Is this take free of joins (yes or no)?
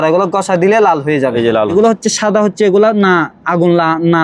no